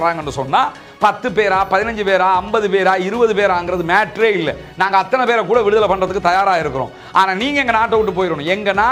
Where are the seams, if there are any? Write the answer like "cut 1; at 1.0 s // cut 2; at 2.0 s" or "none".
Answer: none